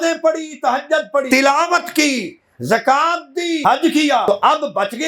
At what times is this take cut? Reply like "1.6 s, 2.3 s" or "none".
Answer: 1.3 s, 3.6 s, 4.2 s

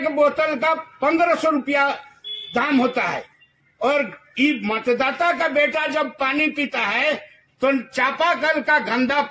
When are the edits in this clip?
none

